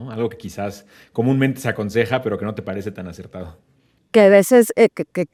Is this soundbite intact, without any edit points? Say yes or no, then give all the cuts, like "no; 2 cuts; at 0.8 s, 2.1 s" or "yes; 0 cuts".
yes; 0 cuts